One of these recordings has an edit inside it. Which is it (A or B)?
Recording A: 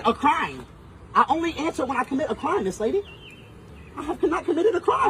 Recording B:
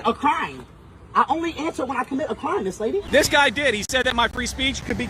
B